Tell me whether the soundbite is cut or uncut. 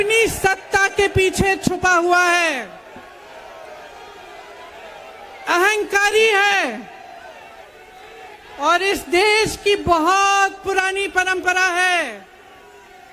uncut